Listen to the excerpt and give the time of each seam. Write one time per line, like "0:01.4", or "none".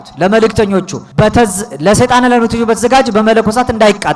0:01.0